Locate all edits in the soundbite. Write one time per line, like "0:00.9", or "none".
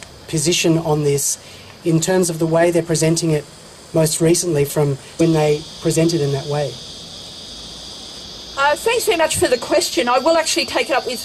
none